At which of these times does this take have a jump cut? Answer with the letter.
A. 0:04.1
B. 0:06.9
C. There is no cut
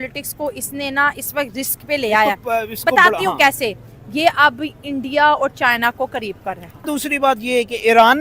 B